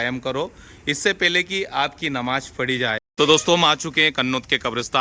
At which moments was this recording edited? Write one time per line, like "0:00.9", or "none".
0:03.0